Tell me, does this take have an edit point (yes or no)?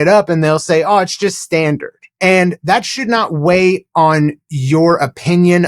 yes